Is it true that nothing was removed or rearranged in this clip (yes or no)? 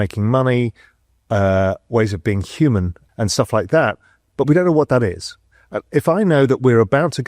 no